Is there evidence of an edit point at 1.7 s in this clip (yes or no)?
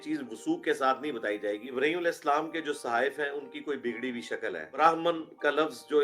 yes